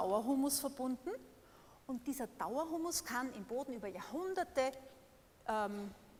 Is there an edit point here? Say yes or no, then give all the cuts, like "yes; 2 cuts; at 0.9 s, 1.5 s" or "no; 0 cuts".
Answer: no; 0 cuts